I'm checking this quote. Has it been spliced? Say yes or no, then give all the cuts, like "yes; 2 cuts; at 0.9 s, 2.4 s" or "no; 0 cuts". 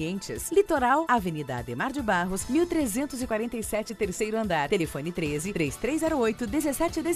no; 0 cuts